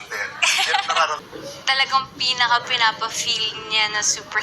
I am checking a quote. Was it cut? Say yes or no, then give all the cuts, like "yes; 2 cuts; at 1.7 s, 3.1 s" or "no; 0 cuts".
yes; 1 cut; at 1.2 s